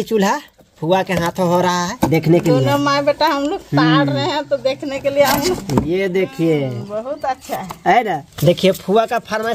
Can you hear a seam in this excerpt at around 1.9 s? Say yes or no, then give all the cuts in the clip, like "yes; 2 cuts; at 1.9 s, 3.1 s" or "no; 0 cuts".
yes; 3 cuts; at 1.9 s, 5.6 s, 8.3 s